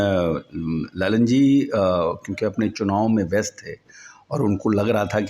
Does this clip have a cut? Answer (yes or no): no